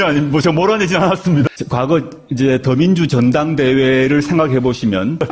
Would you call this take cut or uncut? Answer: cut